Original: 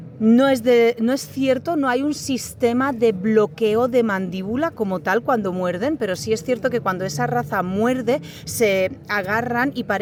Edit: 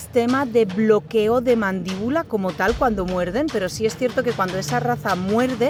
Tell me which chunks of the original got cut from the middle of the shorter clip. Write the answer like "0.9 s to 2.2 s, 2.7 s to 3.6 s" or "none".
none